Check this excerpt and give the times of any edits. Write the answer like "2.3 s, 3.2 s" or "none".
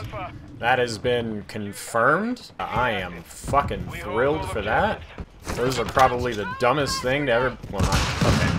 none